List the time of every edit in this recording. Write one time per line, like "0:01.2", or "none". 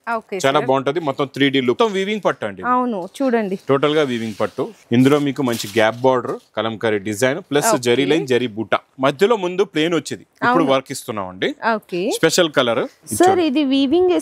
0:01.8
0:04.7
0:08.9
0:13.0